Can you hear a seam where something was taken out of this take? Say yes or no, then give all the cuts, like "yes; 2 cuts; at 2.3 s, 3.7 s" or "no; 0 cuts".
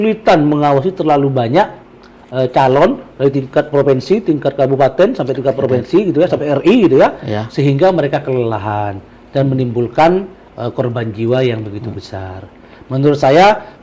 no; 0 cuts